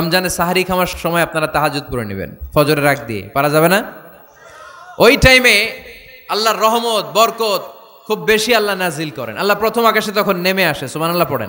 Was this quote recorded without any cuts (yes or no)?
no